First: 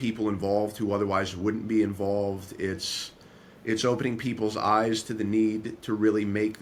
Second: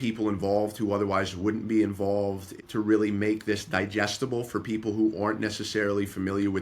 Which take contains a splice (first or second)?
second